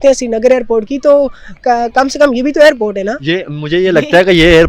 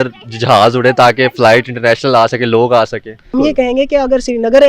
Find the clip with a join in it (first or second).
second